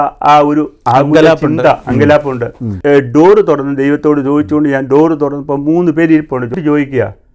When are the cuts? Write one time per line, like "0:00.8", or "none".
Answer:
0:02.8
0:06.5